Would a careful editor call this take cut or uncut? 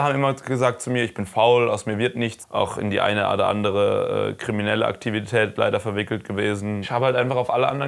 cut